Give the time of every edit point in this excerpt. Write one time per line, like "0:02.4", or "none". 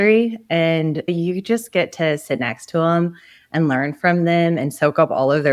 0:01.1